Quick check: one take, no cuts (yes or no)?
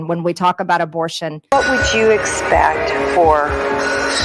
no